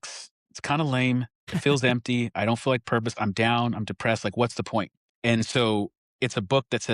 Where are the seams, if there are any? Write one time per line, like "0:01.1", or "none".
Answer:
0:01.4
0:05.0

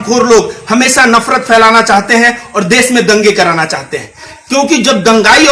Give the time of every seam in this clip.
0:04.3

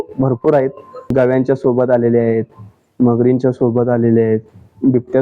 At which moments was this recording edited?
0:01.1

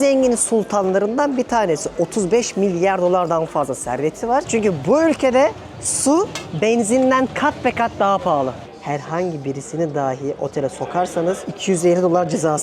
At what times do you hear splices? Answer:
0:04.5
0:08.6
0:11.5

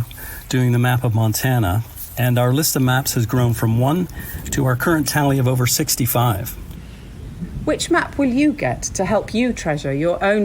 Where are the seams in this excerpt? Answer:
0:06.9

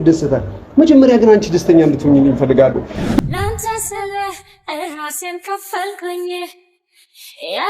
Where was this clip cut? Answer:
0:03.2

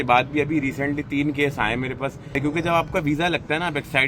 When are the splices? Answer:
0:02.4

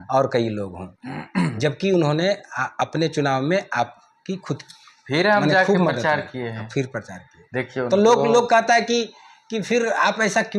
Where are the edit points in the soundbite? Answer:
none

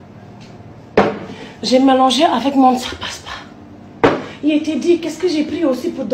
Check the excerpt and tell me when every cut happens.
0:01.1
0:02.3

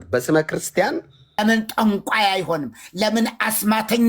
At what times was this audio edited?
0:01.4

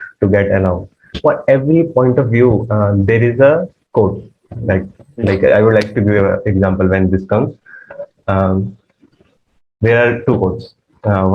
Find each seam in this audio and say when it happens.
0:01.1

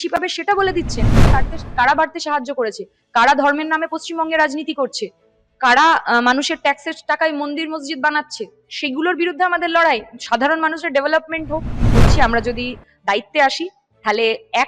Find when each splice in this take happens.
0:01.2
0:11.9

